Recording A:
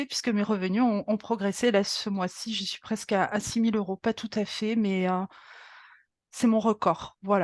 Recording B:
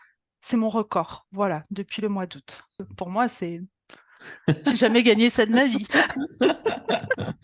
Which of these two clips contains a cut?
B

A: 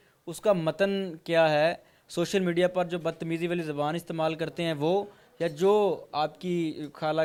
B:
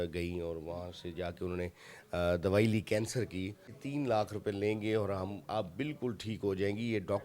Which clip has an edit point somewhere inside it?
B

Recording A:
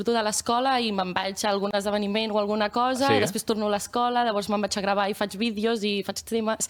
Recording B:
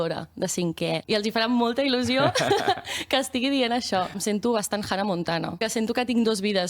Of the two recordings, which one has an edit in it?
B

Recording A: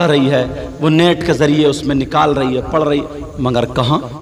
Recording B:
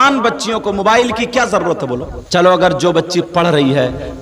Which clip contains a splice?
B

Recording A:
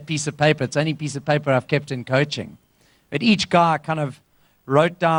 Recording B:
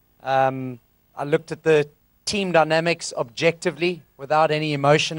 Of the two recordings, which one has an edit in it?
B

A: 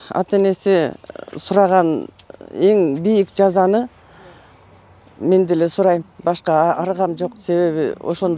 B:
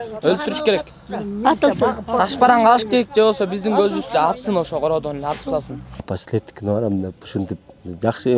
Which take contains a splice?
B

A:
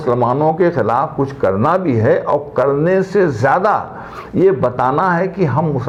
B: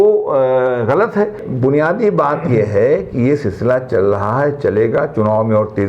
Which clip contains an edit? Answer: B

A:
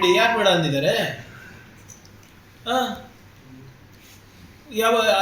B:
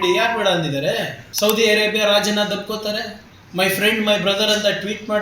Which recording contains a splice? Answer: B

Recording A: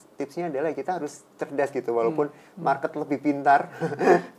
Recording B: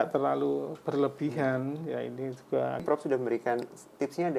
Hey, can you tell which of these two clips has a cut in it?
B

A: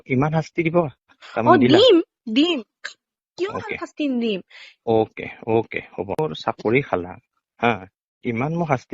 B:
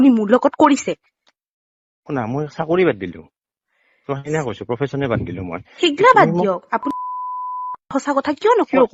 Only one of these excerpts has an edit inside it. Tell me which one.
A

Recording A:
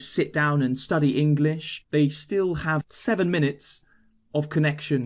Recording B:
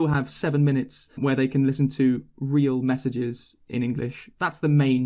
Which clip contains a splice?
A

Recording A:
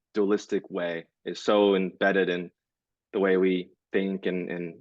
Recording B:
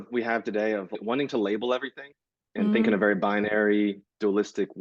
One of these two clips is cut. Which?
B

